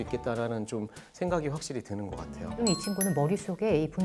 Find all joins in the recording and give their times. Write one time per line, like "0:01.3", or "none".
0:02.6